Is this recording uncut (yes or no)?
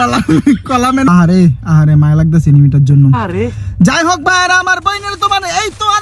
no